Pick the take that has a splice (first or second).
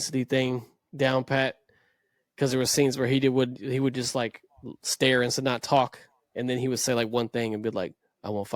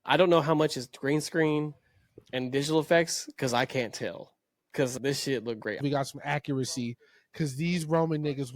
second